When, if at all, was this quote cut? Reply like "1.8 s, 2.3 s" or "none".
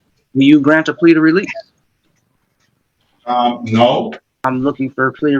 4.3 s